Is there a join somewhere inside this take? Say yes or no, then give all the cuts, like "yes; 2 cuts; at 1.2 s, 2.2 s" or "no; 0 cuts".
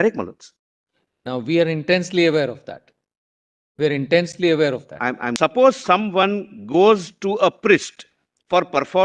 yes; 1 cut; at 5.3 s